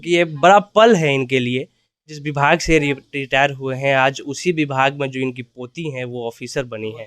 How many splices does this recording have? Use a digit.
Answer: 1